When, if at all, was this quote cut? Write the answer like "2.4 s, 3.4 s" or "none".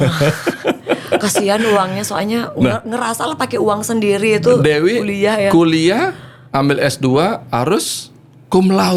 none